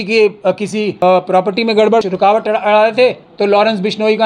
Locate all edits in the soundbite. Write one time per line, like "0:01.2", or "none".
0:01.0
0:02.0

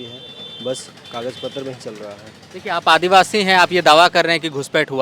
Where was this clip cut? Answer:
none

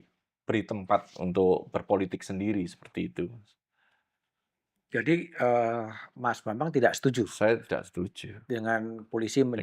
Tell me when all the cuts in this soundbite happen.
none

